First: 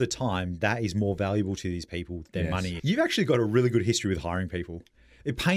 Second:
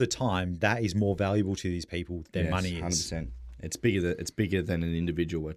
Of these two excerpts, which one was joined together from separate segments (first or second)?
first